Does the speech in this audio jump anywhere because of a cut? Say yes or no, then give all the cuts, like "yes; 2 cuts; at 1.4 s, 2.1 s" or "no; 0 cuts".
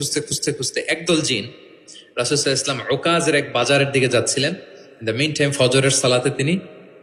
no; 0 cuts